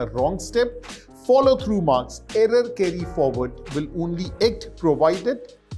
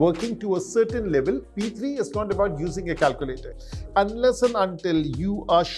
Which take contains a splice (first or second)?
second